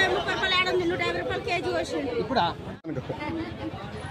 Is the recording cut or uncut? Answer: uncut